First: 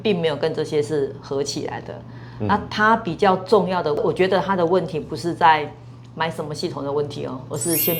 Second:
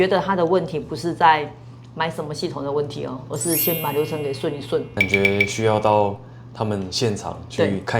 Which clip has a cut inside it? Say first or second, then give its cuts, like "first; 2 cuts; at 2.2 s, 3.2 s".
second; 1 cut; at 4.9 s